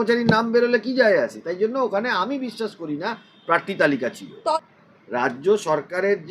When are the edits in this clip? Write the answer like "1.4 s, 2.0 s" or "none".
4.6 s